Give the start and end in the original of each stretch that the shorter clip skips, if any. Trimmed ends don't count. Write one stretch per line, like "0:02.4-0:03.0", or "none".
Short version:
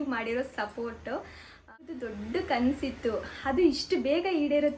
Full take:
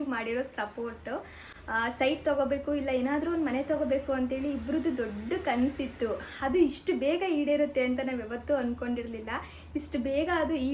0:01.9-0:04.9